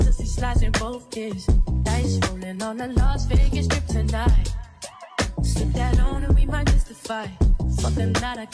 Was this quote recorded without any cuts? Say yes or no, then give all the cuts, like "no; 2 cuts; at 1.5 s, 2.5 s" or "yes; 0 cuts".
yes; 0 cuts